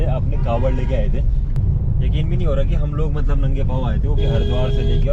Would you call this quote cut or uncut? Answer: cut